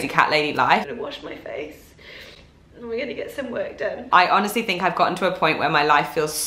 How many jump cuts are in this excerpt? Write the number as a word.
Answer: two